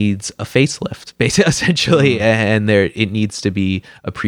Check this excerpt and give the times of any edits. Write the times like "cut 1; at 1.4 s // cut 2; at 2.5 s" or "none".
none